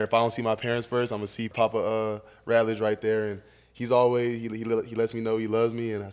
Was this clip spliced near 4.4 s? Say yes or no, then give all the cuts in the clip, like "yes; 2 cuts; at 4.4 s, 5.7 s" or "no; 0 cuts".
no; 1 cut; at 1.5 s